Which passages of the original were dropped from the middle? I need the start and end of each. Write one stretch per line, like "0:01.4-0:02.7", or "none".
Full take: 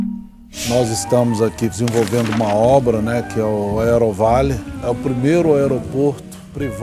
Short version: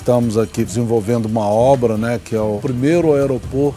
0:03.6-0:05.0